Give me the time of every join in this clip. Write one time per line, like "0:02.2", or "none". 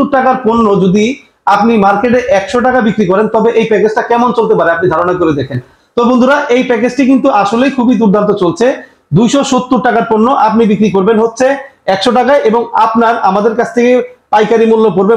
none